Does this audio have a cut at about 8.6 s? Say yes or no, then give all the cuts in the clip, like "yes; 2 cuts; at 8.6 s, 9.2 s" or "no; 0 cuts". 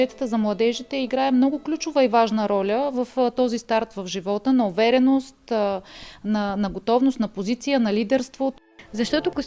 yes; 1 cut; at 8.6 s